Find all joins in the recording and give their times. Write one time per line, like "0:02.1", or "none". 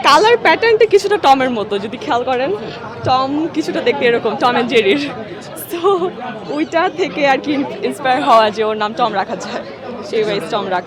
none